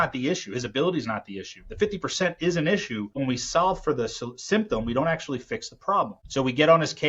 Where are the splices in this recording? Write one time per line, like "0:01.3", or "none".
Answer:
0:03.2
0:06.2

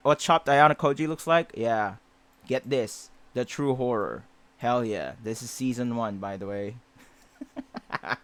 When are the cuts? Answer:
none

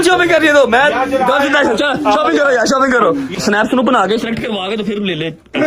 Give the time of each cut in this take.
0:03.3

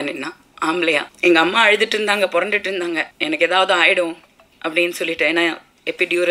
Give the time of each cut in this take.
0:01.1
0:03.1

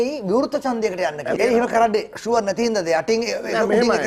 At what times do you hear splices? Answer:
0:01.4

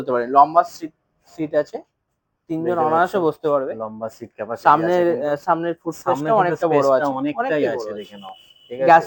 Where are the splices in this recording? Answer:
none

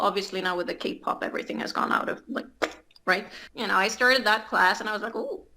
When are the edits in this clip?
0:03.4

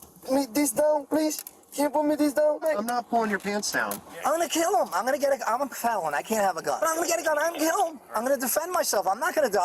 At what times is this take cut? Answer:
0:02.6
0:04.0
0:06.8
0:08.0

